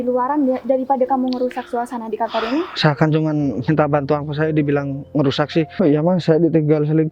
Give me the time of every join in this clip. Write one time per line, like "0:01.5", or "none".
0:05.7